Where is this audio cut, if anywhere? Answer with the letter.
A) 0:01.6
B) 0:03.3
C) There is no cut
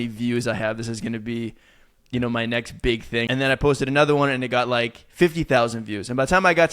B